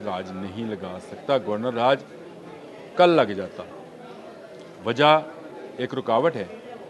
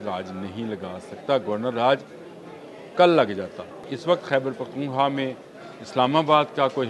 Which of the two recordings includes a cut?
second; 1 cut; at 3.9 s

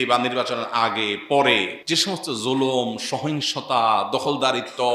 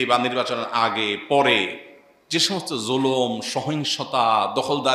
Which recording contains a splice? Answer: first; 1 cut; at 1.8 s

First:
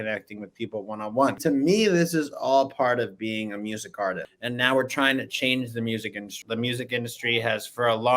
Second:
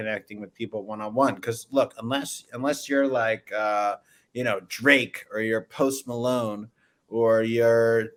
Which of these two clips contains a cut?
first; 3 cuts; at 1.4 s, 4.3 s, 6.3 s

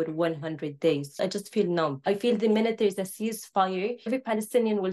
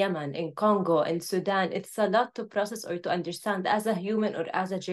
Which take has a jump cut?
first; 3 cuts; at 1.2 s, 2.0 s, 4.1 s

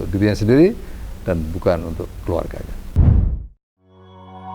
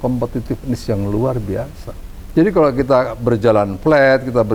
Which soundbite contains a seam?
first; 1 cut; at 2.8 s

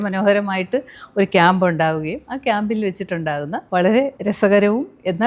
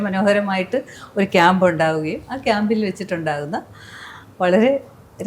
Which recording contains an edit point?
first; 2 cuts; at 3.6 s, 4.2 s

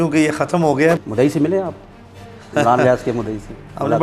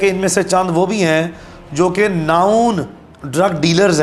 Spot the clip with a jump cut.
first; 1 cut; at 1.0 s

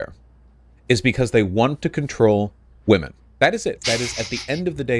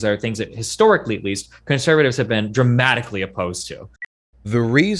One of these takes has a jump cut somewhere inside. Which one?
second; 1 cut; at 4.1 s

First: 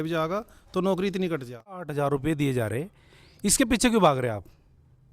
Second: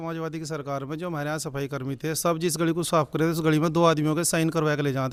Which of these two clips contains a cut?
first; 1 cut; at 1.9 s

